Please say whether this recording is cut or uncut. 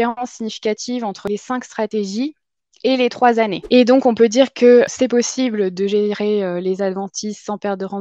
cut